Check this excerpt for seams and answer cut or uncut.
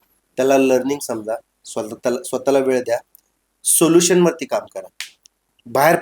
uncut